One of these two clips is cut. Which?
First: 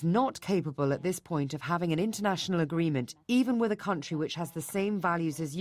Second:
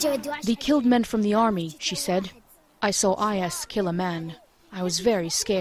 first; 1 cut; at 3.1 s

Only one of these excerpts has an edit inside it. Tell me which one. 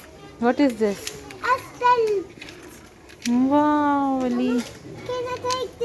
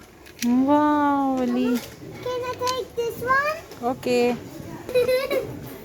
second; 1 cut; at 4.9 s

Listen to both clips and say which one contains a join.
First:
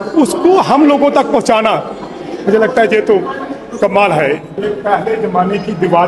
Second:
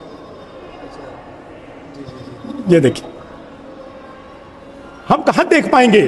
first; 1 cut; at 4.5 s

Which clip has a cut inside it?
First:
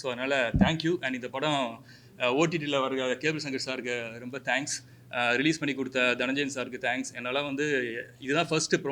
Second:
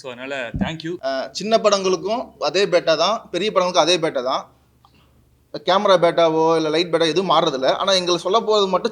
second; 1 cut; at 1.0 s

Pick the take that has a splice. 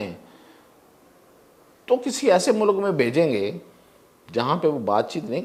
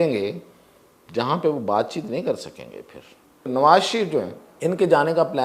second; 2 cuts; at 3.5 s, 4.4 s

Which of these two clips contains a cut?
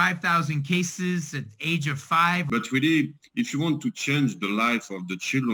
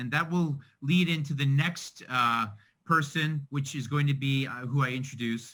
first; 1 cut; at 2.5 s

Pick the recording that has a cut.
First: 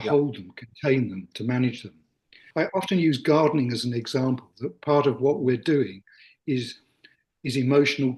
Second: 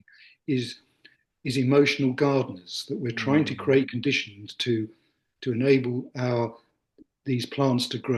first; 1 cut; at 2.4 s

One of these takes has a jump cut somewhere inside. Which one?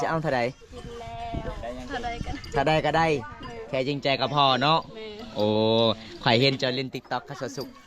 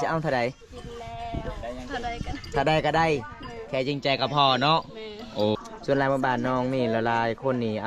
second; 1 cut; at 5.5 s

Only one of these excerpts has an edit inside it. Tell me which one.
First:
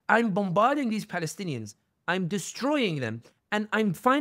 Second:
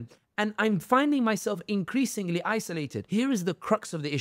second; 1 cut; at 3.0 s

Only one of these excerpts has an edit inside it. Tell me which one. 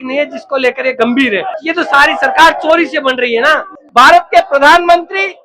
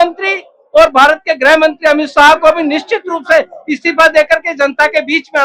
first; 2 cuts; at 1.6 s, 3.8 s

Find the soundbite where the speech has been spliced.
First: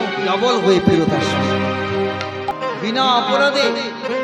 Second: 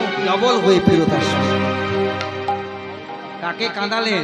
first; 1 cut; at 2.5 s

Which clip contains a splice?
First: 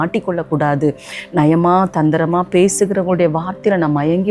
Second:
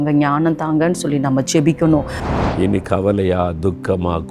second; 1 cut; at 2.2 s

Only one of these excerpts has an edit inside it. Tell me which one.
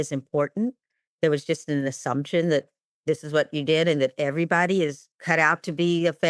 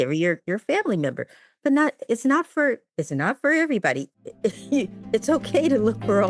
first; 1 cut; at 5.1 s

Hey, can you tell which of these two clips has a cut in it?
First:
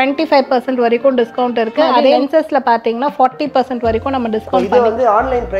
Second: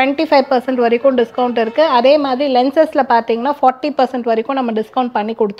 first; 2 cuts; at 2.2 s, 4.6 s

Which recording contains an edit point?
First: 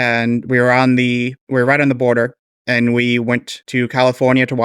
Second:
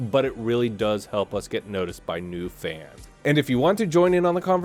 first; 2 cuts; at 1.4 s, 3.6 s

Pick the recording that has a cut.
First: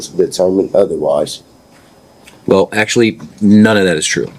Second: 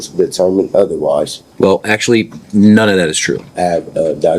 second; 2 cuts; at 1.4 s, 3.5 s

